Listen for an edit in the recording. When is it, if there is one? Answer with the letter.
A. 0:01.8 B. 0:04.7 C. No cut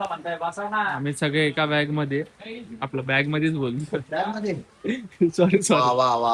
C